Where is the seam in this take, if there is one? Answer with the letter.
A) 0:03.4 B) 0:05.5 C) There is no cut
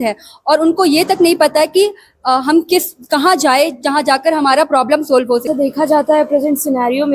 B